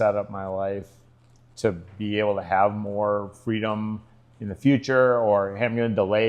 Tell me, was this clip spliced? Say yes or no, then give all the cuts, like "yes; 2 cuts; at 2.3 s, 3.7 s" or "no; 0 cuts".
no; 0 cuts